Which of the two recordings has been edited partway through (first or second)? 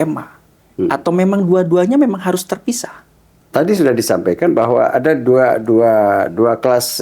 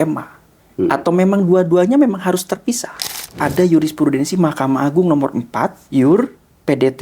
second